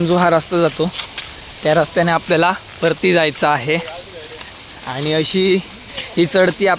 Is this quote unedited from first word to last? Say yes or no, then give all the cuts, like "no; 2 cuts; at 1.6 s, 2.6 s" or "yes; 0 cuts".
yes; 0 cuts